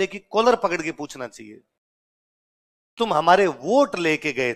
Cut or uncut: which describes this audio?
uncut